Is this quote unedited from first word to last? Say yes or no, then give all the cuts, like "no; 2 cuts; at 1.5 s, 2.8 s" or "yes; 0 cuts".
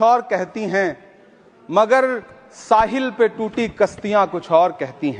yes; 0 cuts